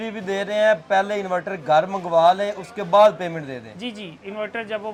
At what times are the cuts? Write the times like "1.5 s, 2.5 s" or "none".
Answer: none